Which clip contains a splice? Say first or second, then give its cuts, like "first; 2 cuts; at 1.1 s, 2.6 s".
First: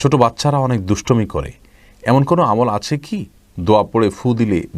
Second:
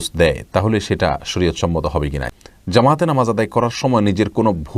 second; 1 cut; at 2.3 s